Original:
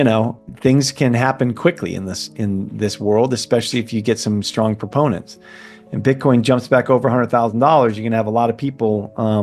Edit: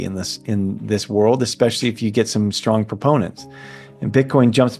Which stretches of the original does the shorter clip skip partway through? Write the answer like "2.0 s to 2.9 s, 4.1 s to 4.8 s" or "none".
none